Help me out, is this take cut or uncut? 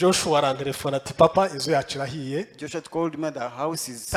uncut